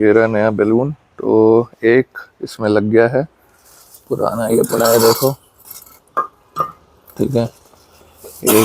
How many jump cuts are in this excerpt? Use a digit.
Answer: 0